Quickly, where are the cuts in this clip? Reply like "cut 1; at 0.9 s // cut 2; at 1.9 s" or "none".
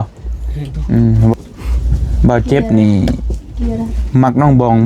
cut 1; at 1.3 s